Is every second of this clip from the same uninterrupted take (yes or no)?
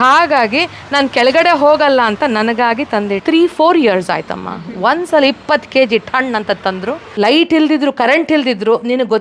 no